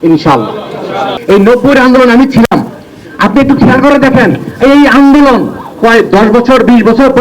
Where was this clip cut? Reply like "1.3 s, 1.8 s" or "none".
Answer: 1.2 s